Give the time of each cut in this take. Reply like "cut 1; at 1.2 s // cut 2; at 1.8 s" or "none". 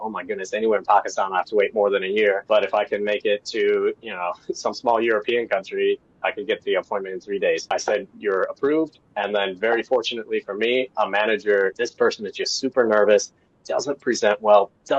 cut 1; at 2.4 s // cut 2; at 7.6 s // cut 3; at 11.7 s